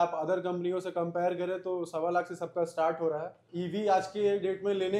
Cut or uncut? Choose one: cut